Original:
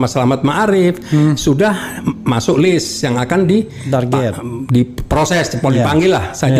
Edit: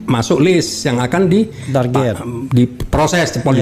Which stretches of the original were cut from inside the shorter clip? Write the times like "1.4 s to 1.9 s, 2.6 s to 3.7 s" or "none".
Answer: none

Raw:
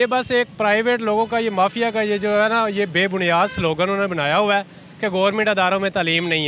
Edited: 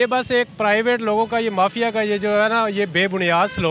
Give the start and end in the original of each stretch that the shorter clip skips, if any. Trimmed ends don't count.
none

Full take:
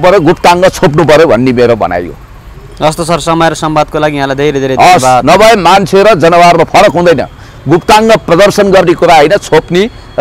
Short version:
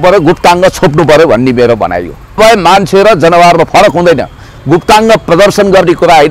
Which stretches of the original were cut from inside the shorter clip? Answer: 2.4 s to 5.4 s

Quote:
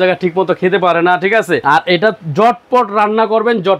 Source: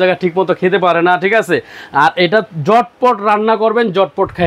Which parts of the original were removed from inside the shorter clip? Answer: 1.6 s to 1.9 s

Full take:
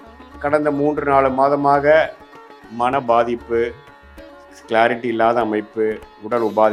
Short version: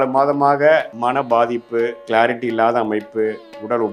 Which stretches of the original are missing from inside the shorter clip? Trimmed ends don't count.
2.2 s to 2.7 s, 3.8 s to 4.6 s

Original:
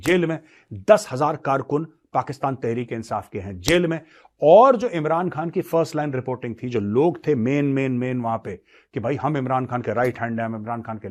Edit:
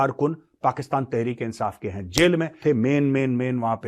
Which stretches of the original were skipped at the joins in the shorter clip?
4.1 s to 7.2 s

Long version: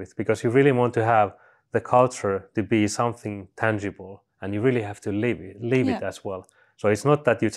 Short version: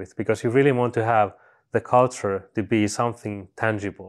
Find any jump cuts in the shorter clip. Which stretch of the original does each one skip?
none

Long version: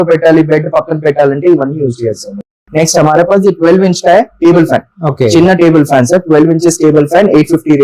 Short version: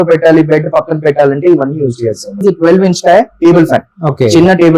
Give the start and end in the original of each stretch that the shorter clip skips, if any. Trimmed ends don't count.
2.4 s to 3.4 s

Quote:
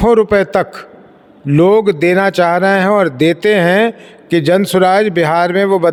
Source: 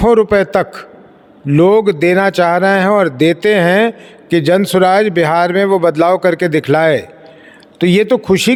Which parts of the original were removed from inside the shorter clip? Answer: none

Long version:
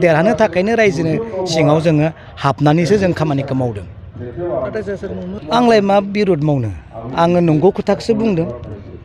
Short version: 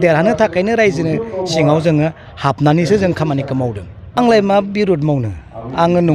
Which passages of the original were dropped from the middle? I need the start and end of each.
4.2 s to 5.6 s

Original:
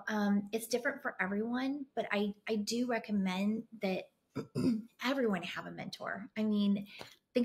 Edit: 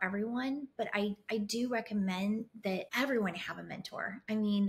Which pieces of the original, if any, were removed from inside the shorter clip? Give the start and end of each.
4.1 s to 5.0 s

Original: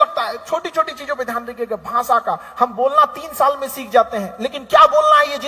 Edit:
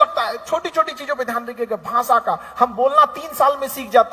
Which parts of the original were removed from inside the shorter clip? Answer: none

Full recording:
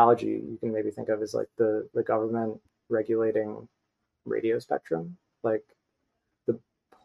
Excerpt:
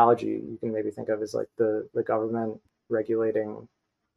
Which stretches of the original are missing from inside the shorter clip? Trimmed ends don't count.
none

